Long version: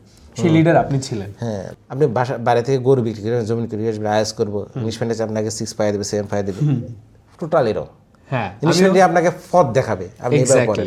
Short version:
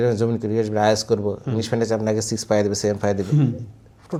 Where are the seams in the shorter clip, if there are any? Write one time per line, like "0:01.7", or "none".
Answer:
none